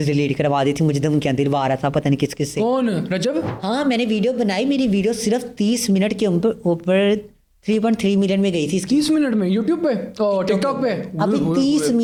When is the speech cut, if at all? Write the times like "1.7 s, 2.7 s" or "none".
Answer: none